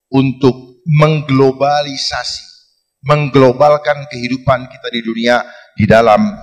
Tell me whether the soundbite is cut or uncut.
uncut